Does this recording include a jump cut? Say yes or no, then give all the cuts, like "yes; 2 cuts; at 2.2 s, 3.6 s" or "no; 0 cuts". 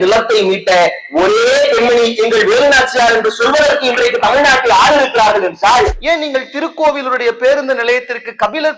yes; 1 cut; at 6.0 s